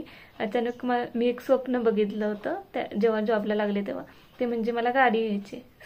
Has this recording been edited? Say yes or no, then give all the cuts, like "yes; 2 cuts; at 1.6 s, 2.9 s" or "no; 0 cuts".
no; 0 cuts